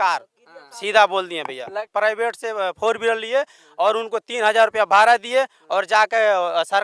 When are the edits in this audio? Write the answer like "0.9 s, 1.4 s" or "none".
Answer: 1.8 s